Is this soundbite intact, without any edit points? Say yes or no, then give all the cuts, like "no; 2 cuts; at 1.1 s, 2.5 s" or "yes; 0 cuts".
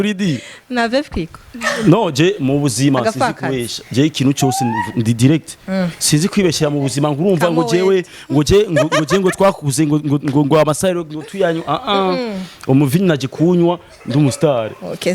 yes; 0 cuts